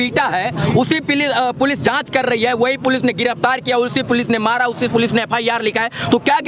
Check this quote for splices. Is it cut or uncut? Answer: uncut